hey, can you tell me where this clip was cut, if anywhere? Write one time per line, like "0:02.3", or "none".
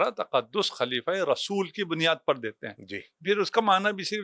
0:03.2